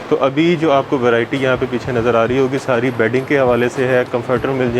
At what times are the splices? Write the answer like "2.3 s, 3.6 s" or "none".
none